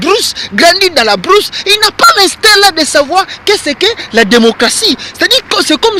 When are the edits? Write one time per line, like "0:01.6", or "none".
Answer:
0:04.6